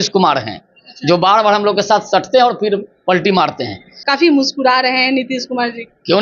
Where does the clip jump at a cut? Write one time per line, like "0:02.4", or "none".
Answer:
0:04.0